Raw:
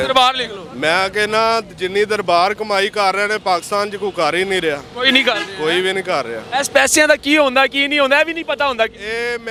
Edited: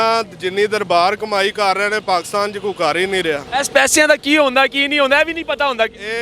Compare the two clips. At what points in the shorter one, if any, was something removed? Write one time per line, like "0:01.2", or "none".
0:03.4